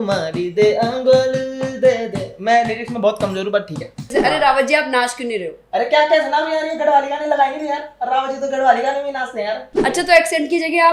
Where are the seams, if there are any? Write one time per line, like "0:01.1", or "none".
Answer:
0:04.1
0:09.7